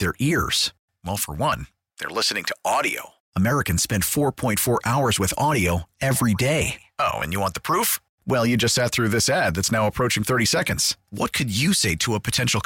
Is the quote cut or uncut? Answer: uncut